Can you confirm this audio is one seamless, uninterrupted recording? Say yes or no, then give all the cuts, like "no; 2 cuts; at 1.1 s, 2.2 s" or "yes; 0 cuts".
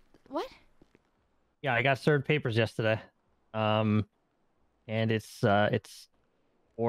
yes; 0 cuts